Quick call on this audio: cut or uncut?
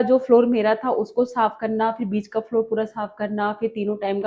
uncut